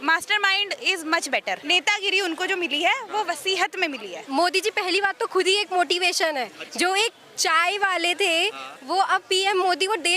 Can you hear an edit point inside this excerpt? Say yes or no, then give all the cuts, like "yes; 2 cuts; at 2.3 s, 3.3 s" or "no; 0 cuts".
yes; 2 cuts; at 1.6 s, 4.1 s